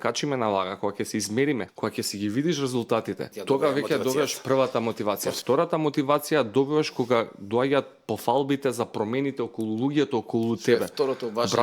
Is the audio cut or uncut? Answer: cut